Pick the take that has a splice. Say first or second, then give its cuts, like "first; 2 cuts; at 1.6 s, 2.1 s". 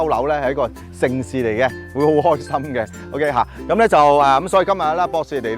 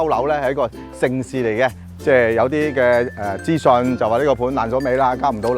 second; 1 cut; at 1.8 s